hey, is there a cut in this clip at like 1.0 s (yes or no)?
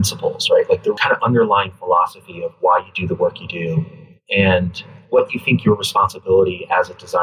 yes